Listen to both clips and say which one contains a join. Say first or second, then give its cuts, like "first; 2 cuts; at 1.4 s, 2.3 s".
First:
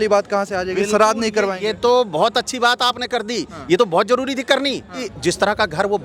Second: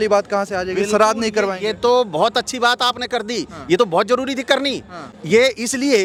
first; 1 cut; at 5.1 s